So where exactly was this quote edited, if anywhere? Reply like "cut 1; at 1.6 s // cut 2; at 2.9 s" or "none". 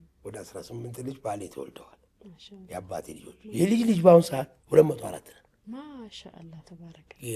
cut 1; at 4.5 s